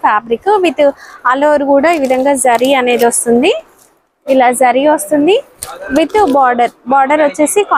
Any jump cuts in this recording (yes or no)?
no